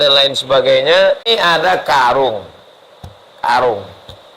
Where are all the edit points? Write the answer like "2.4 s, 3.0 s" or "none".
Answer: 1.2 s